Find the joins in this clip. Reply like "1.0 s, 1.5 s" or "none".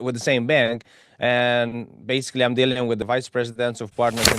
3.0 s